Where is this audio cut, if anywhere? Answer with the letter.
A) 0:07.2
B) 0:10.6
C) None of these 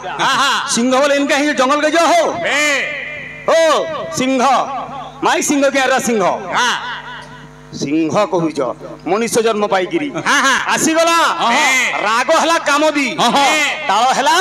C